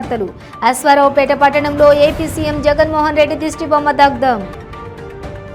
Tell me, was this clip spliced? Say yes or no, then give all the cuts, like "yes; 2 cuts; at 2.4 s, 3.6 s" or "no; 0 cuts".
no; 0 cuts